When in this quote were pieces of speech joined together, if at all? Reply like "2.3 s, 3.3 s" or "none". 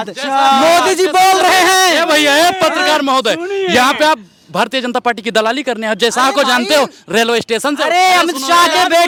none